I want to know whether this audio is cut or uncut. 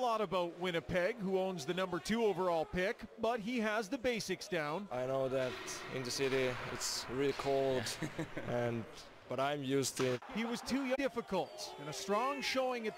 uncut